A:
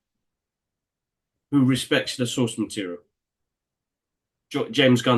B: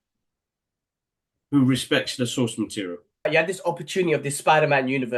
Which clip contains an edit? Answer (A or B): B